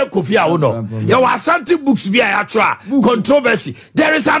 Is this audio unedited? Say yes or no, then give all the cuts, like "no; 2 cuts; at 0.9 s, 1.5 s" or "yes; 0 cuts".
yes; 0 cuts